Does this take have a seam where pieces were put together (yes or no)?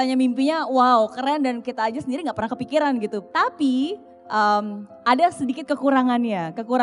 yes